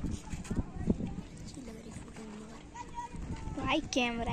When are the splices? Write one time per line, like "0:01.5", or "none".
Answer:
0:01.3

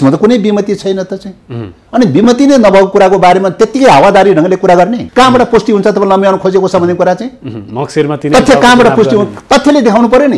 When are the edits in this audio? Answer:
0:05.0

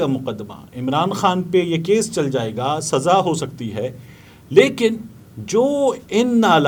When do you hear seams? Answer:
none

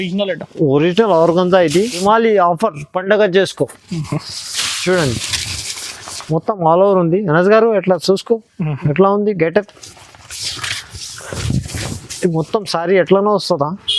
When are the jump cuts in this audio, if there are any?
0:02.0

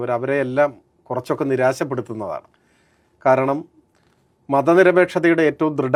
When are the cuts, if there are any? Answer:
none

